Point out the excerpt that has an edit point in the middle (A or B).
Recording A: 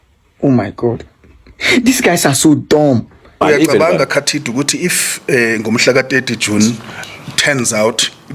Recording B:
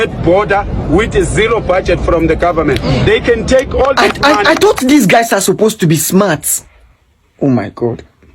A